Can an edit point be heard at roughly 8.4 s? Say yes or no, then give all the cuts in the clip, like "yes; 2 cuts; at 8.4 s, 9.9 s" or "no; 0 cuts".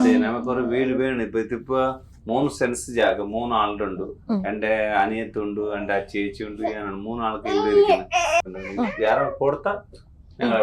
yes; 1 cut; at 8.4 s